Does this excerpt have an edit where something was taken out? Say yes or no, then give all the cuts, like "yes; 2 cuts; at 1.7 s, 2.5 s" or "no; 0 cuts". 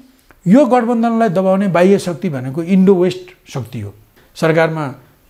yes; 1 cut; at 4.2 s